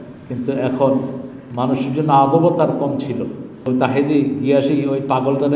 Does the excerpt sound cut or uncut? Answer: cut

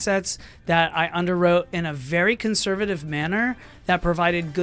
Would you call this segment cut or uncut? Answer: uncut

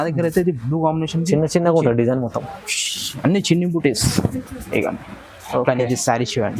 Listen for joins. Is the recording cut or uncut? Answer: uncut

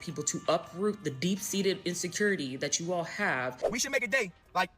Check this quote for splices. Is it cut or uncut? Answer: cut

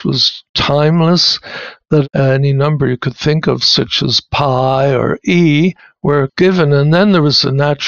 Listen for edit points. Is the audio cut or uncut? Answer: cut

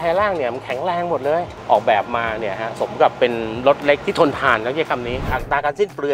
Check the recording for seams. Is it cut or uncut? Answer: cut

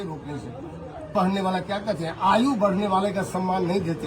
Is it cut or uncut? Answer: cut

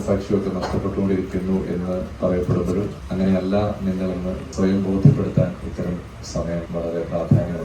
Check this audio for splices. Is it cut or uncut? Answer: cut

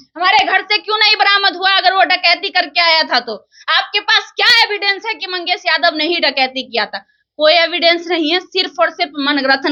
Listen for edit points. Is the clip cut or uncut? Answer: uncut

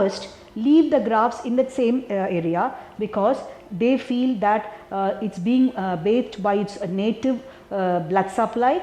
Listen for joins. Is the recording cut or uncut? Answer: uncut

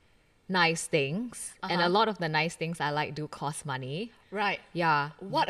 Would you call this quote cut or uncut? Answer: uncut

